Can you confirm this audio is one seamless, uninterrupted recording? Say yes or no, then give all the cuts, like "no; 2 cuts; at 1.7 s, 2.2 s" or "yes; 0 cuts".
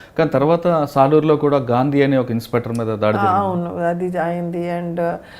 yes; 0 cuts